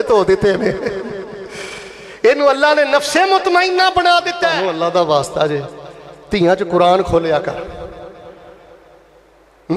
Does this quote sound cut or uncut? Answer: cut